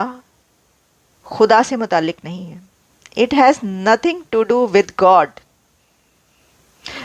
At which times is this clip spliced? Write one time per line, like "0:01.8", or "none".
none